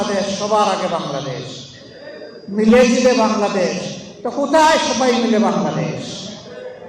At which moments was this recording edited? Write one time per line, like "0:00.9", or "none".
none